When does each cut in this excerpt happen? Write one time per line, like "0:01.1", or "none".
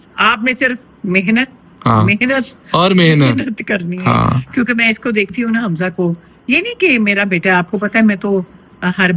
none